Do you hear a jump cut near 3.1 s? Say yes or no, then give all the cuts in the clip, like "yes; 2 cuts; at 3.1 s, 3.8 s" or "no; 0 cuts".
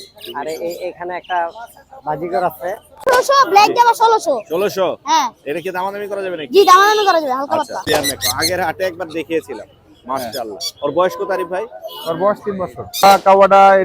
yes; 3 cuts; at 3.1 s, 7.8 s, 13.0 s